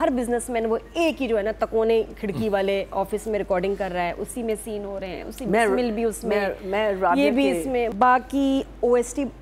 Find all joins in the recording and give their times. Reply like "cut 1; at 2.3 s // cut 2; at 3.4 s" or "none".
cut 1; at 7.9 s